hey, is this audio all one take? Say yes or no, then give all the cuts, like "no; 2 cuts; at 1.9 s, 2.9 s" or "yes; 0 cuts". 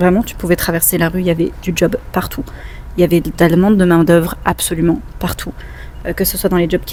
yes; 0 cuts